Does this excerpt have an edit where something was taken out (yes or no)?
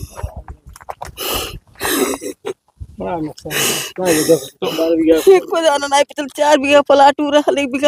no